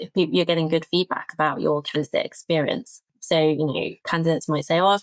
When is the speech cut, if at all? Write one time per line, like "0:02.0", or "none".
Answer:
0:03.1
0:04.0